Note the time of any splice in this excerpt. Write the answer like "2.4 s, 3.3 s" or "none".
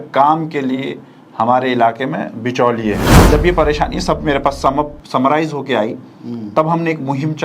3.1 s